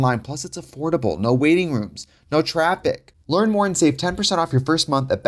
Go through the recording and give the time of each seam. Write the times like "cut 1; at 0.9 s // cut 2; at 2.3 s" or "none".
cut 1; at 3.1 s